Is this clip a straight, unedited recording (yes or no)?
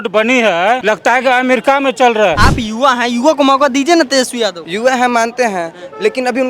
no